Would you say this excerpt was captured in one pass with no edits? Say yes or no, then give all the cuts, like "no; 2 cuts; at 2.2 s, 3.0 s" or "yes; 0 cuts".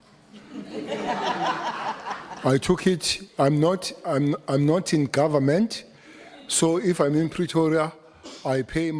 yes; 0 cuts